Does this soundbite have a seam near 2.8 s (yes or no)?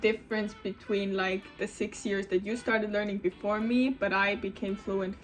no